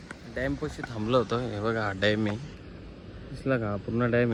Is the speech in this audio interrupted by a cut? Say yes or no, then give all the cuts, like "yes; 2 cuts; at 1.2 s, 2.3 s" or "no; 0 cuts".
no; 0 cuts